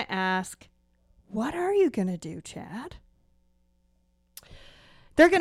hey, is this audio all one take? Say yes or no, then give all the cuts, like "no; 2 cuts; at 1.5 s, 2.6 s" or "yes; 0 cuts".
yes; 0 cuts